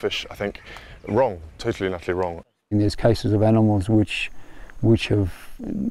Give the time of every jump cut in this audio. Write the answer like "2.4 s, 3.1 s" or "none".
2.7 s